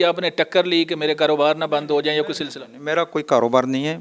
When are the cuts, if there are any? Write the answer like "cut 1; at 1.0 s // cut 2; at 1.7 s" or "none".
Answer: none